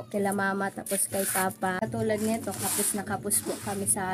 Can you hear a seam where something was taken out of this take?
yes; 1 cut; at 1.8 s

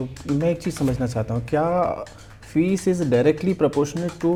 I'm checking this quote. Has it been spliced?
no; 0 cuts

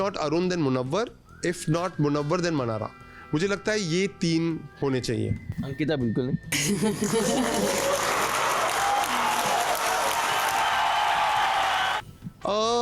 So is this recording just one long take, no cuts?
yes; 0 cuts

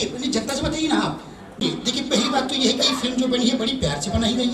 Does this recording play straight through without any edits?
no; 1 cut; at 1.6 s

